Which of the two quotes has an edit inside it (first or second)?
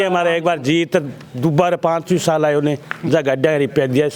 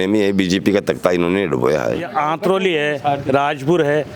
second